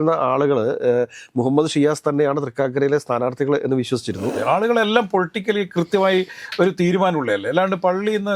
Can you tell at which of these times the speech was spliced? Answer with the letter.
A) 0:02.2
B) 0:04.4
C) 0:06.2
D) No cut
B